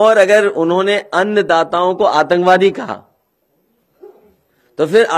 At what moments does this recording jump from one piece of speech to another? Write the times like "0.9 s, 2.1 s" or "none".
3.9 s